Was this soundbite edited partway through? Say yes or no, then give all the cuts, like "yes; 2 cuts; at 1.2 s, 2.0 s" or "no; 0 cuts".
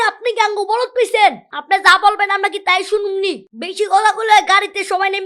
yes; 1 cut; at 3.4 s